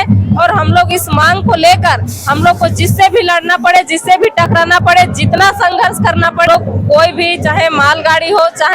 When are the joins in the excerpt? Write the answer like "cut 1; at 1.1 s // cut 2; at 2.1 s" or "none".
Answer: cut 1; at 6.5 s